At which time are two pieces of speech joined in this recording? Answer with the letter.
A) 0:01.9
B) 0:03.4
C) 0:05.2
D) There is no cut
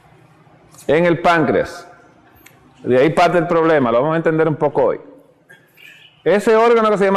C